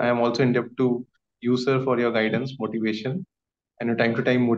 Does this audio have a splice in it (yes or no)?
no